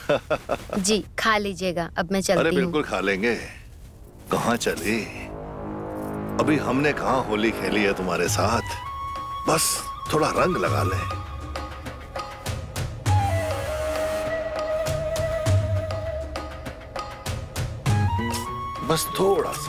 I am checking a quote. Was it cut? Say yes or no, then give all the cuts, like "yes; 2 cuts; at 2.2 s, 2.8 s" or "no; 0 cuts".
no; 0 cuts